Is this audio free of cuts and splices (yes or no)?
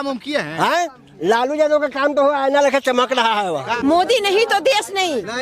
no